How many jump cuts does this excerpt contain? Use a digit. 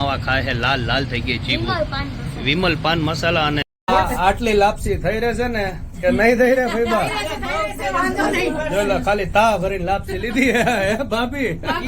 2